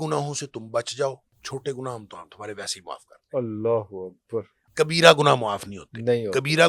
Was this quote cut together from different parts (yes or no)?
yes